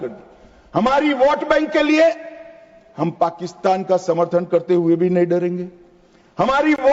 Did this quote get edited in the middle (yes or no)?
no